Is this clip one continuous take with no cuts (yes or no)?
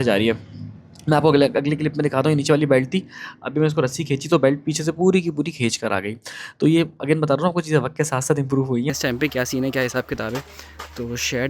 no